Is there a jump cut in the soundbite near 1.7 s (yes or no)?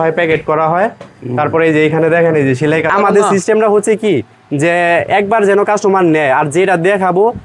no